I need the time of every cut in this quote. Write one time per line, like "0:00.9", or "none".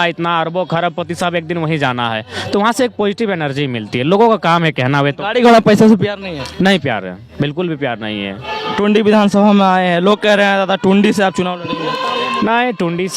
0:08.4